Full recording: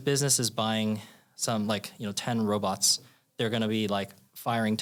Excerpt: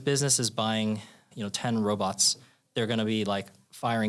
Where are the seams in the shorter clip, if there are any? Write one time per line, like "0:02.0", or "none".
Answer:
0:01.3